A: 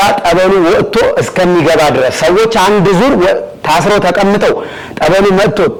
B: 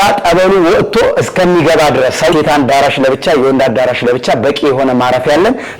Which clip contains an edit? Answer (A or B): B